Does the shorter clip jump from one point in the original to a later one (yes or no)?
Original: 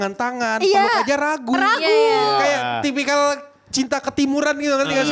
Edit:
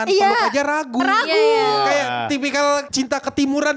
yes